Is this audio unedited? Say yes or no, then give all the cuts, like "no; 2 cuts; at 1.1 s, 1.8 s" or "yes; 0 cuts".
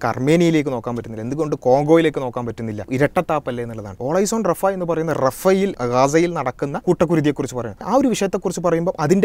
no; 5 cuts; at 2.9 s, 4.0 s, 5.8 s, 6.8 s, 7.8 s